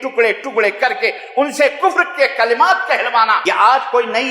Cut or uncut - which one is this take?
cut